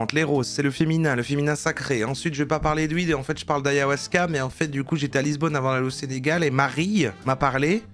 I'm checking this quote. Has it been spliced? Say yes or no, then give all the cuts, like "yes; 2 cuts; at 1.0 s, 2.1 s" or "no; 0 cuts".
no; 0 cuts